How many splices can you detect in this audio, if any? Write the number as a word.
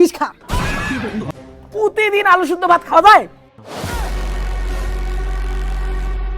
one